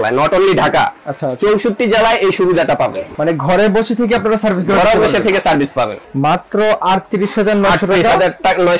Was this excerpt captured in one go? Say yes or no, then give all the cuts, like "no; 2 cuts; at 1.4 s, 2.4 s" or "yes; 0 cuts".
no; 2 cuts; at 3.1 s, 6.0 s